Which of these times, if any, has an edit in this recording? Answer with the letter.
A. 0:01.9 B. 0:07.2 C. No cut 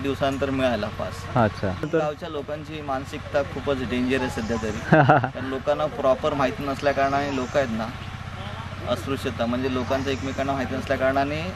A